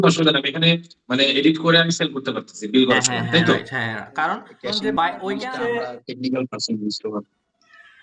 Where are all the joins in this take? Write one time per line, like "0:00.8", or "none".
0:05.4